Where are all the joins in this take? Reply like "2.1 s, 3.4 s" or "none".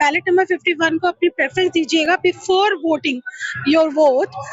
none

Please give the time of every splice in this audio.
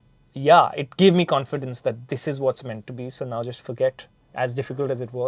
none

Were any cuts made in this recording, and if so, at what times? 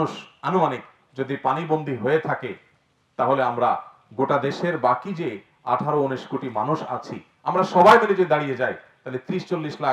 none

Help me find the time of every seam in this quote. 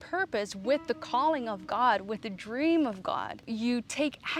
3.5 s

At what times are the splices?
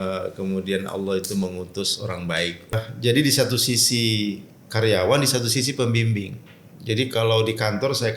2.7 s

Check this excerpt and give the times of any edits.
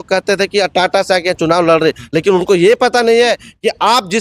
none

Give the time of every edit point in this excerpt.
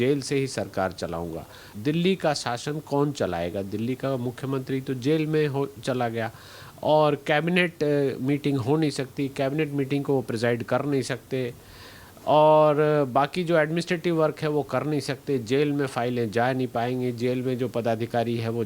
1.6 s

